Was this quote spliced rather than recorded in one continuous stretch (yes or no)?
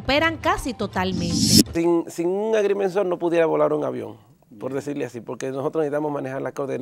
yes